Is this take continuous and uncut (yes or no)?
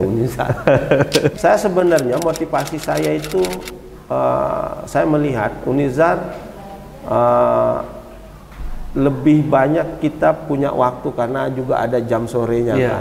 no